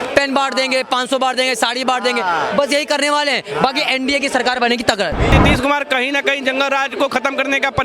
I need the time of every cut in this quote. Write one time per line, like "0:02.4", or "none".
0:05.3

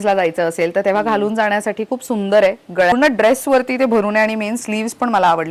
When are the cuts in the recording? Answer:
0:02.9

